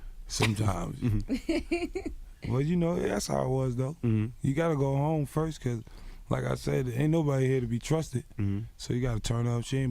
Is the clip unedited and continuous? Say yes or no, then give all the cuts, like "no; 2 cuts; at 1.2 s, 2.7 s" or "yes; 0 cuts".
no; 1 cut; at 4.3 s